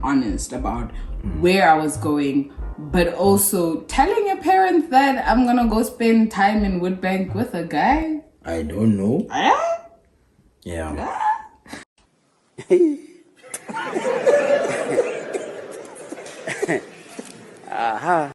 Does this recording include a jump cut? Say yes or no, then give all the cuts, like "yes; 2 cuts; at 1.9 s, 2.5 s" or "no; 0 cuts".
no; 0 cuts